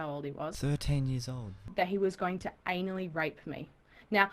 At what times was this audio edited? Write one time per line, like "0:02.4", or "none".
0:01.1